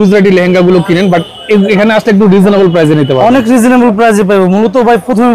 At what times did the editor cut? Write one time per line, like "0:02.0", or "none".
none